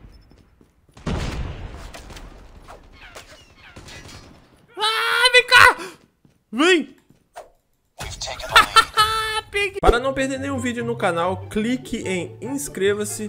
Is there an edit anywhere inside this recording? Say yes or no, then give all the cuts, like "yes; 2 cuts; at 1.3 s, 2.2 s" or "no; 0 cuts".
yes; 1 cut; at 9.7 s